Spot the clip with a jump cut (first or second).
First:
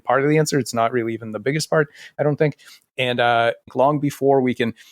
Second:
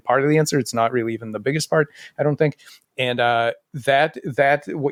first